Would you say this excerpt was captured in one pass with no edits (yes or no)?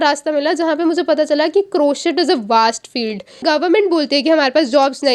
no